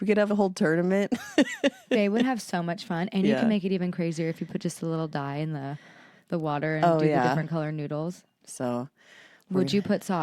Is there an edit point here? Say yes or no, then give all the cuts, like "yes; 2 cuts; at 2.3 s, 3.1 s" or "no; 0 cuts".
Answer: yes; 1 cut; at 8.4 s